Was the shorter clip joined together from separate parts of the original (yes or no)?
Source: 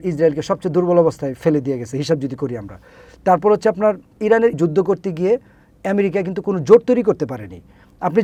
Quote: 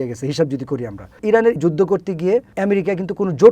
yes